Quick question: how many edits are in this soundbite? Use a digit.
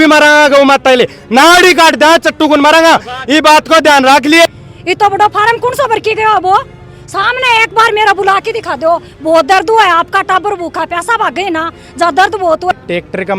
2